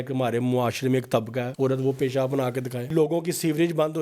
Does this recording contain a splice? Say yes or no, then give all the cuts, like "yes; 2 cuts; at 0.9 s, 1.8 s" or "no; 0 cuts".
yes; 2 cuts; at 1.5 s, 2.9 s